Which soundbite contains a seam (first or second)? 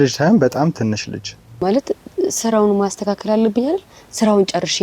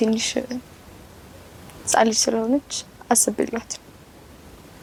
first